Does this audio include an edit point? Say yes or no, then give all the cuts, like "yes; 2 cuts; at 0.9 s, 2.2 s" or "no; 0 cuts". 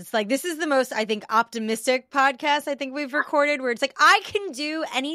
no; 0 cuts